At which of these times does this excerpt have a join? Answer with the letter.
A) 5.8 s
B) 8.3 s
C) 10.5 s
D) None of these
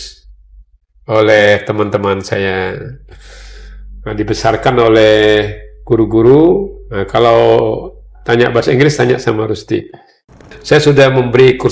C